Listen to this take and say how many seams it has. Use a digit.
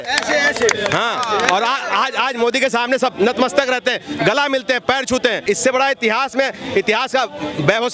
1